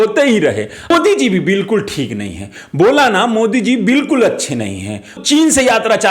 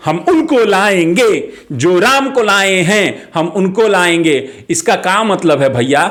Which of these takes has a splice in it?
first; 2 cuts; at 0.9 s, 5.2 s

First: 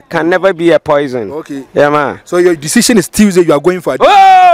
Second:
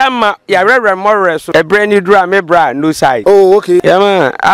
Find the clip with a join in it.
second; 3 cuts; at 1.4 s, 3.2 s, 3.8 s

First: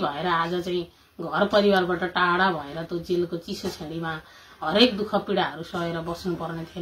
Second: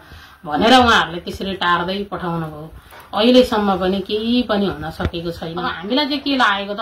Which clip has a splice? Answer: second; 1 cut; at 5.7 s

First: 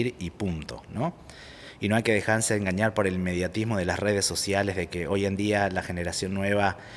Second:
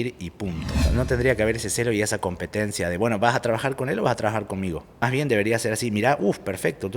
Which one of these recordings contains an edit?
second; 2 cuts; at 0.9 s, 4.9 s

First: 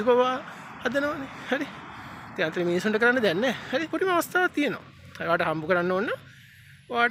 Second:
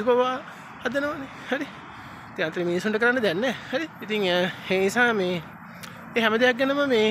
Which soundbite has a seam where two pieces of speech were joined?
first; 1 cut; at 3.9 s

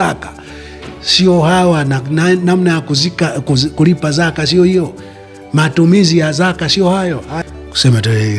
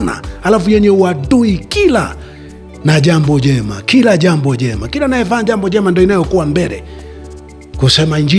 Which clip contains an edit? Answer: first; 1 cut; at 7.3 s

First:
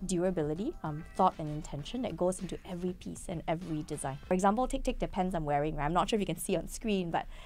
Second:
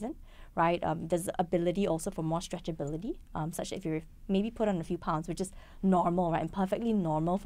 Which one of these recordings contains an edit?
first; 1 cut; at 4.3 s

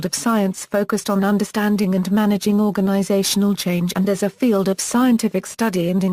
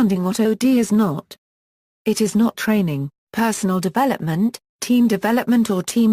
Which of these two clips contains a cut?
second; 1 cut; at 4.6 s

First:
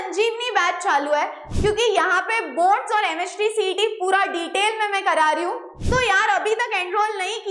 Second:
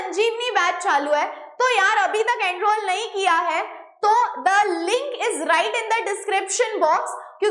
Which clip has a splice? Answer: first; 2 cuts; at 1.4 s, 5.7 s

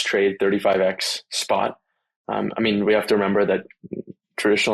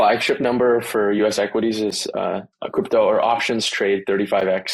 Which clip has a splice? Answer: second; 1 cut; at 2.5 s

